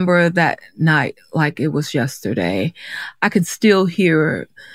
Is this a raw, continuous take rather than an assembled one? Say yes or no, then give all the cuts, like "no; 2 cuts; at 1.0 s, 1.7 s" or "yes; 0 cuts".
yes; 0 cuts